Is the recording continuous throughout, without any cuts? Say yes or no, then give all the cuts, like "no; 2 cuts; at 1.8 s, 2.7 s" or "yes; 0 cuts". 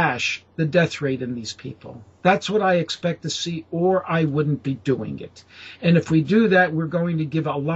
yes; 0 cuts